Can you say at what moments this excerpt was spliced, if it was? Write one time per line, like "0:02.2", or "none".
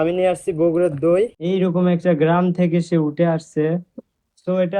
0:01.4

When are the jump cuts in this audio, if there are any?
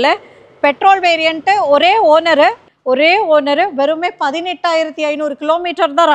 0:02.6

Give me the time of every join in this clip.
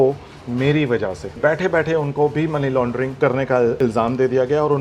0:01.3
0:03.1
0:03.8

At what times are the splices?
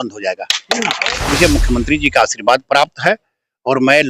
0:01.1

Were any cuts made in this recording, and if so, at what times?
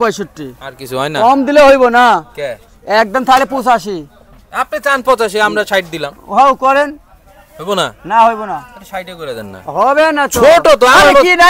none

